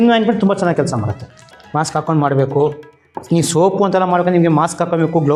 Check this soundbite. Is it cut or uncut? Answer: uncut